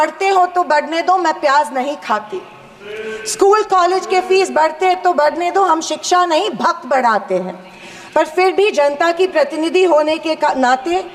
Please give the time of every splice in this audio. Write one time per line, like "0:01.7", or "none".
none